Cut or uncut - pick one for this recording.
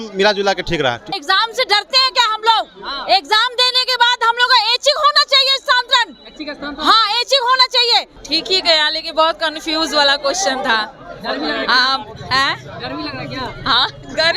cut